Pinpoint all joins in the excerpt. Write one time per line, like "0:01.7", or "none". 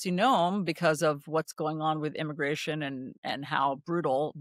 none